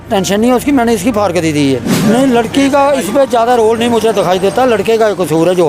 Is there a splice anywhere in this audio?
yes; 1 cut; at 1.9 s

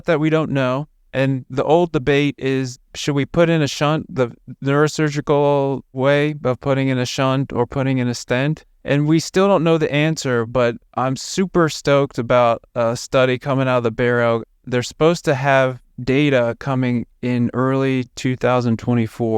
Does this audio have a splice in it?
yes; 2 cuts; at 8.7 s, 14.5 s

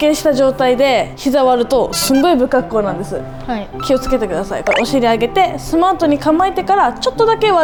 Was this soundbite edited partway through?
no; 0 cuts

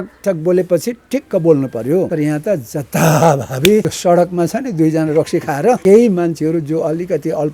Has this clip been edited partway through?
yes; 3 cuts; at 2.1 s, 3.9 s, 5.8 s

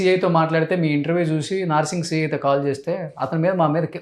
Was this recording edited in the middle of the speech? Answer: no; 0 cuts

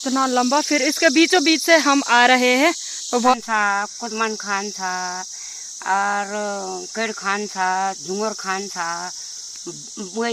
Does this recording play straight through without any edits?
no; 1 cut; at 3.3 s

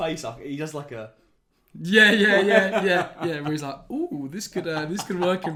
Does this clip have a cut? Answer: no; 0 cuts

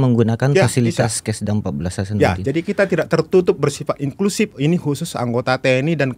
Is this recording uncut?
yes; 0 cuts

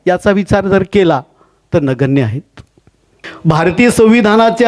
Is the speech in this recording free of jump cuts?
no; 1 cut; at 3.3 s

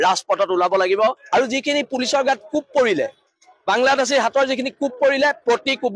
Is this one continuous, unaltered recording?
no; 1 cut; at 1.2 s

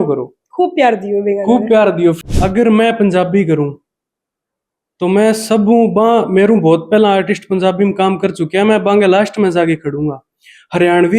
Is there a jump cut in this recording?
yes; 1 cut; at 2.2 s

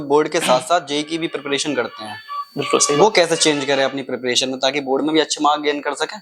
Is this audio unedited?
yes; 0 cuts

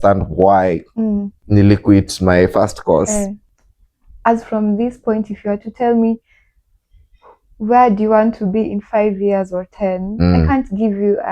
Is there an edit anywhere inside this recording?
yes; 2 cuts; at 1.3 s, 3.5 s

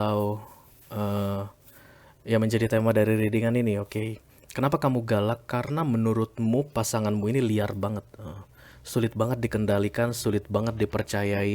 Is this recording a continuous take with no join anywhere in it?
yes; 0 cuts

